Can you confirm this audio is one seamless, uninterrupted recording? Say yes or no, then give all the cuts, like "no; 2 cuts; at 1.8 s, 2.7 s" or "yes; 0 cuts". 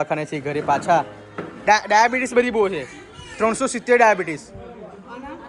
no; 1 cut; at 1.5 s